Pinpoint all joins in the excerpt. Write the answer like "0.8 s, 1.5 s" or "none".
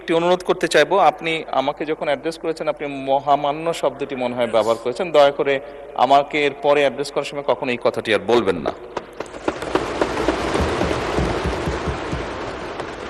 none